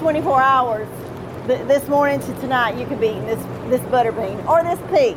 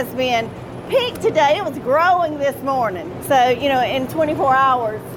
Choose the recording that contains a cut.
second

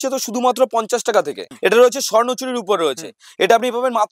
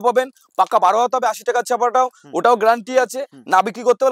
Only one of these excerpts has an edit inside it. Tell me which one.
first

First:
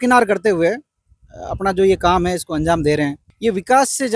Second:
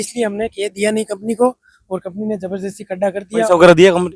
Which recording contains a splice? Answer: first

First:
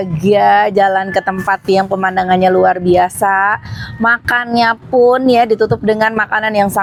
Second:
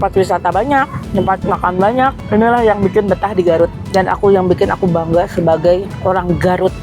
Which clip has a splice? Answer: second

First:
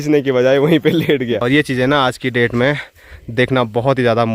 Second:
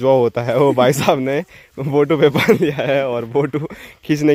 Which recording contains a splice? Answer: first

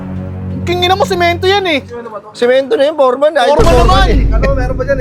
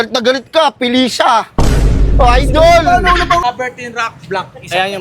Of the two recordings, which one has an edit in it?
second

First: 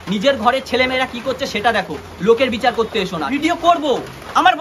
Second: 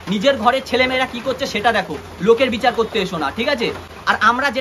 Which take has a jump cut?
first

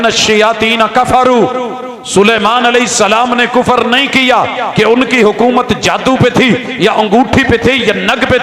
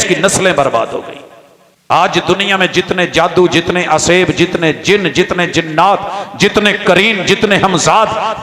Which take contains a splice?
second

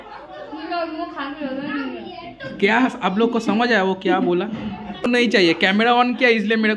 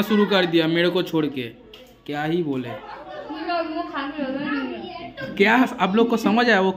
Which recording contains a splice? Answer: first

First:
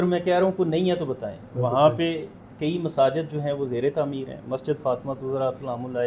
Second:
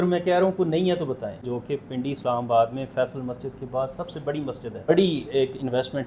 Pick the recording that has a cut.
second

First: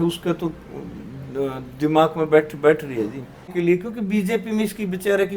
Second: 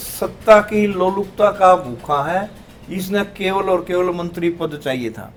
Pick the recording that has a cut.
first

